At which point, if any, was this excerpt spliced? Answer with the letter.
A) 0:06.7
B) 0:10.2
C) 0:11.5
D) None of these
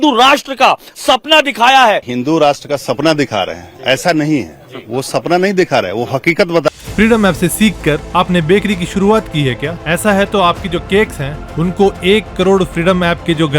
A